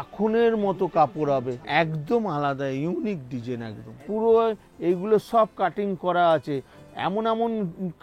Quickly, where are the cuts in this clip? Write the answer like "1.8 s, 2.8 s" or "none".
1.6 s, 3.9 s